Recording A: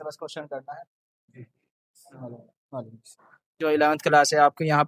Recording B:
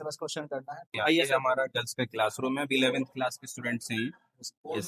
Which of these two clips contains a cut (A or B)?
B